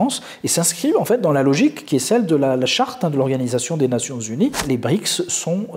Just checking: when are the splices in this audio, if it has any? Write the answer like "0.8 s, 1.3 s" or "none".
4.6 s